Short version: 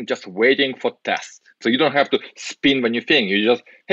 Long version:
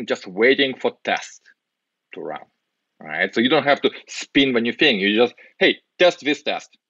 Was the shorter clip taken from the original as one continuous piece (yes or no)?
no